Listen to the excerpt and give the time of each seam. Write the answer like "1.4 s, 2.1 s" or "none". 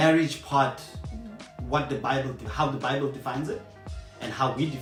none